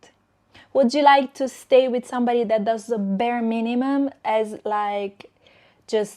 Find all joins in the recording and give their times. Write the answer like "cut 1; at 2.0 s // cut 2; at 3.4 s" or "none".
none